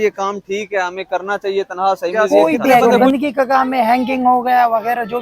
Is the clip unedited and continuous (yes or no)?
no